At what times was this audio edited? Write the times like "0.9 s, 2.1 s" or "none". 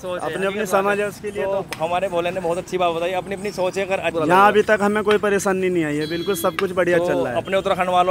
4.1 s